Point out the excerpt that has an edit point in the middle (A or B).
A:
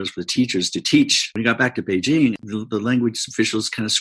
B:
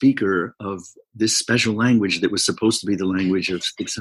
A